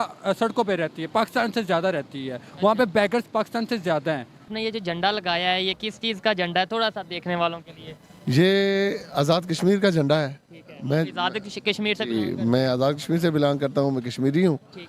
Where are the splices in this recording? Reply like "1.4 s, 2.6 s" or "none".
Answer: 4.5 s

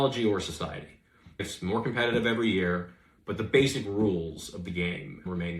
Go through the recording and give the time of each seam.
1.4 s

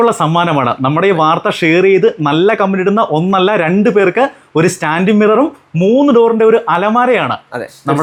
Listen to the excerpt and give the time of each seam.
none

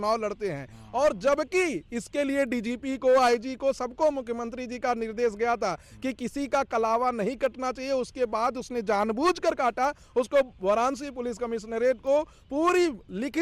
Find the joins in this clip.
none

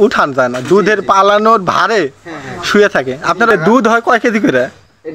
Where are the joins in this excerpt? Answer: 3.5 s

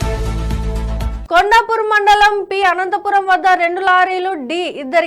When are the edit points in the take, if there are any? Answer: 1.2 s

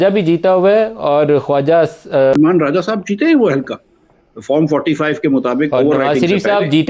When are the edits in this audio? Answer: 2.4 s

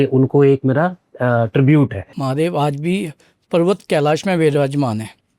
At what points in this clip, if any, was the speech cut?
2.1 s

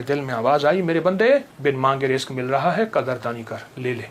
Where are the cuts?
1.5 s

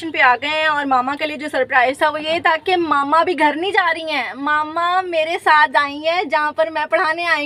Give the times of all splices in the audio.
none

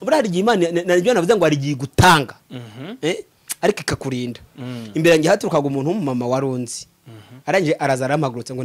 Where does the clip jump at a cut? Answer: none

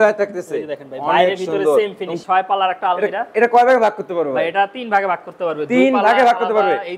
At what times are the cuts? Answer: 2.1 s

